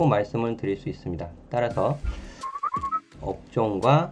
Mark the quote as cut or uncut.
cut